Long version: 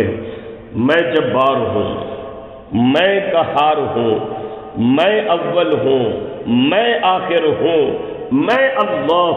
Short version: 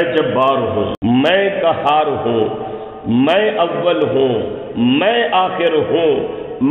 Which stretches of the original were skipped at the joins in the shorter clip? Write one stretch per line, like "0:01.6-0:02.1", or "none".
0:01.9-0:02.6